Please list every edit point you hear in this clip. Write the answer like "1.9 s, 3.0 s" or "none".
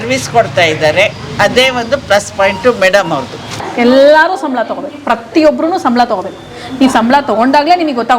3.4 s